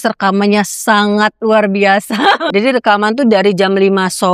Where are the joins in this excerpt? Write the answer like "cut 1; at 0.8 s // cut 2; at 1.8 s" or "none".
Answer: cut 1; at 1.4 s // cut 2; at 2.4 s

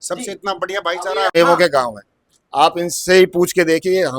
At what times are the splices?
cut 1; at 1.3 s

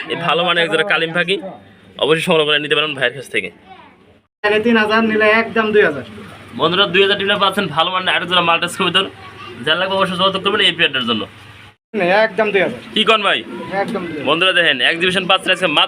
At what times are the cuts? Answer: cut 1; at 4.4 s // cut 2; at 12.0 s

